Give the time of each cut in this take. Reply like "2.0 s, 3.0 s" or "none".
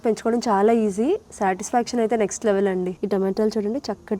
3.0 s